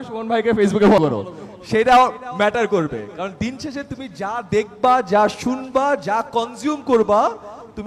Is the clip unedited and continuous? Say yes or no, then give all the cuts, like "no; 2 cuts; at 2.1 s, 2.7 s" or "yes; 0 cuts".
no; 1 cut; at 1.0 s